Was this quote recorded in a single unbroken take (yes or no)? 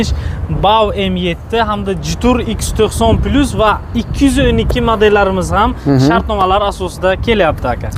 yes